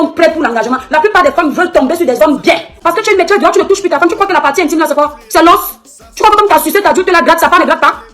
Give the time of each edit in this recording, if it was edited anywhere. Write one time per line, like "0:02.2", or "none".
0:02.7